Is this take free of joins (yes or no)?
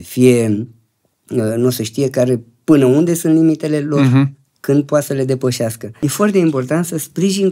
no